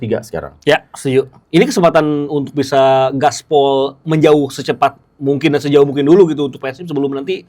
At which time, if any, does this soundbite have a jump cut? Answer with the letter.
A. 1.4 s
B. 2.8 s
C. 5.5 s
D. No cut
A